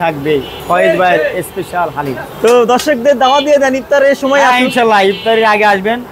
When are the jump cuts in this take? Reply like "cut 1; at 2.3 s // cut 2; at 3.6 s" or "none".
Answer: none